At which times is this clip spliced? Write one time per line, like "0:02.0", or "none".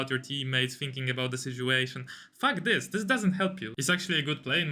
0:03.7